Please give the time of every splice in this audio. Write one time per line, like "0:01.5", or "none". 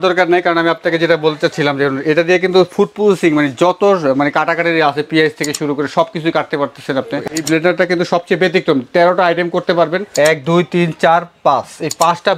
0:07.4
0:10.0